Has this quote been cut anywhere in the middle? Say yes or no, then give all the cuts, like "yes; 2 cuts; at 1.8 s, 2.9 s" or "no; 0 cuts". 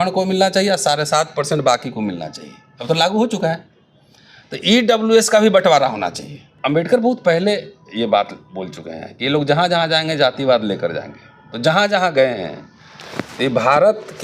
yes; 1 cut; at 6.6 s